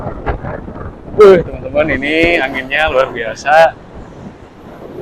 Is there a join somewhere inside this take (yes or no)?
no